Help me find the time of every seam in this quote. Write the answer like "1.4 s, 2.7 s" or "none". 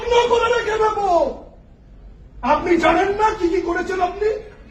none